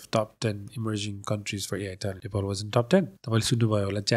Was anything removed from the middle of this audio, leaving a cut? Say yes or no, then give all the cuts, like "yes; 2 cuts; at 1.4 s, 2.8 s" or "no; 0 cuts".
yes; 2 cuts; at 2.2 s, 3.2 s